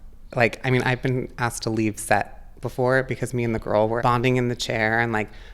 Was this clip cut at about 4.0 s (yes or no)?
yes